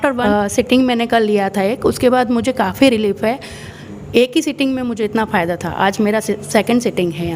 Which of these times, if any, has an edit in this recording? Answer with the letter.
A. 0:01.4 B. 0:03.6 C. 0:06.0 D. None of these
B